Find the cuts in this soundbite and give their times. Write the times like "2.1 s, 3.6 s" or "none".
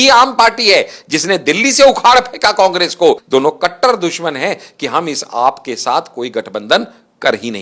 3.2 s